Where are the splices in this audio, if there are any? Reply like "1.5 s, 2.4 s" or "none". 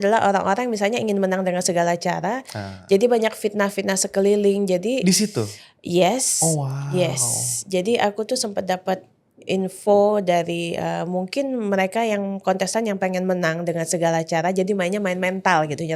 none